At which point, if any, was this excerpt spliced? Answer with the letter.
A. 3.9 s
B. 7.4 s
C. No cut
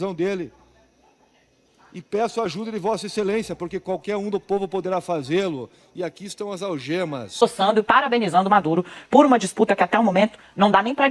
B